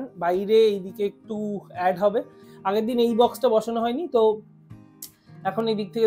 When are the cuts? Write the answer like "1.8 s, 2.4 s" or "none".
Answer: 2.4 s